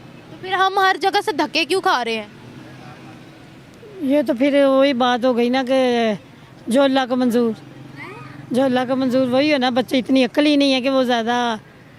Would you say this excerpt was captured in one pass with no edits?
yes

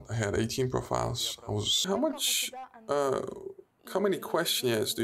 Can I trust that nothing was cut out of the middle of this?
no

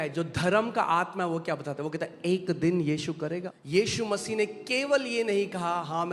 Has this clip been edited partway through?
yes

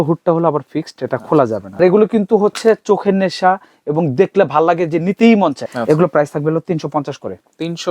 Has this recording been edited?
yes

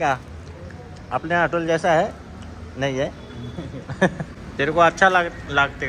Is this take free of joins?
no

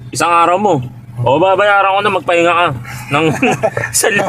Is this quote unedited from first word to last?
yes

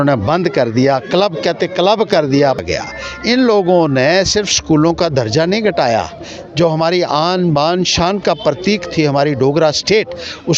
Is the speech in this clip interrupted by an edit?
yes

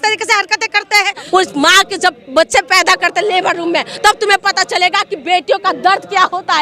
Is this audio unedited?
no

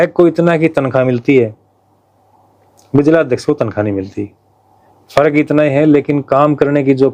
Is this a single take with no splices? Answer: yes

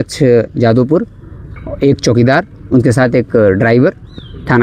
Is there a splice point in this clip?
no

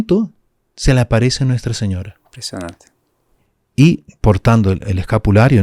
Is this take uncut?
yes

